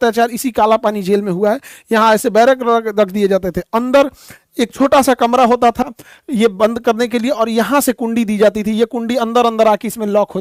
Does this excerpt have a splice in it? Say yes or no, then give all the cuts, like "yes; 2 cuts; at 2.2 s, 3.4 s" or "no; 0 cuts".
no; 0 cuts